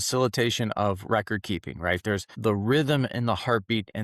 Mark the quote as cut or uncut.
cut